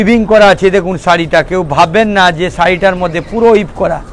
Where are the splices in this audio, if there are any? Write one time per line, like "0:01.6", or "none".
none